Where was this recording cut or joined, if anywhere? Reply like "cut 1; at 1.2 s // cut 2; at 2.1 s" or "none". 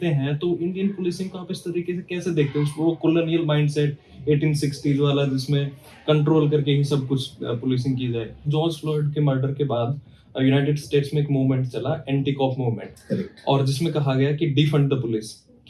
cut 1; at 8.5 s